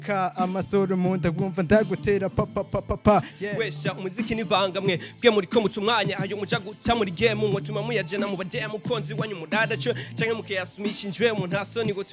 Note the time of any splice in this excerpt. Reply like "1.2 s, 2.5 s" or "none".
3.4 s

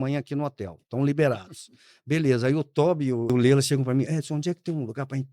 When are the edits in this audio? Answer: 3.3 s

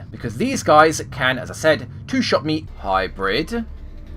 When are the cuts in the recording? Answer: 2.7 s

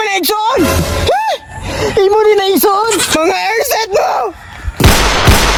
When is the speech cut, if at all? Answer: none

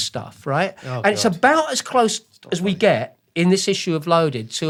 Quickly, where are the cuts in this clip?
none

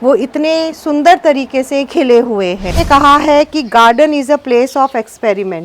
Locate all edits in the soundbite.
2.8 s

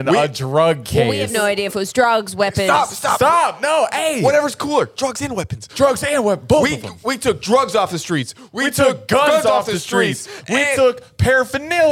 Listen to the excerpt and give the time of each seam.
none

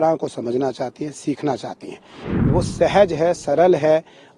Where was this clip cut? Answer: 2.5 s

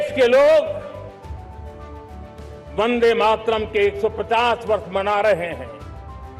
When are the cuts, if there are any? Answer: none

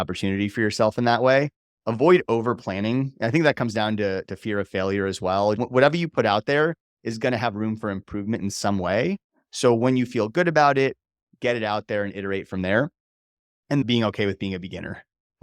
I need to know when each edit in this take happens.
5.6 s, 13.8 s

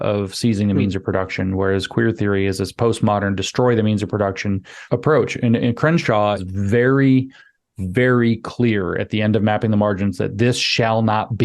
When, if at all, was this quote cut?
4.7 s, 6.4 s

